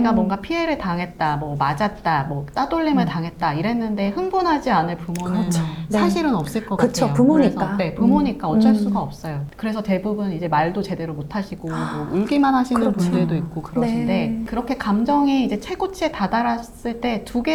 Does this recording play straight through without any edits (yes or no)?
yes